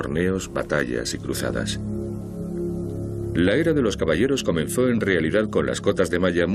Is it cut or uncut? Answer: cut